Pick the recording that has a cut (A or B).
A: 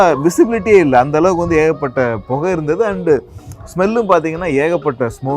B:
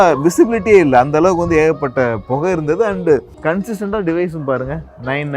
B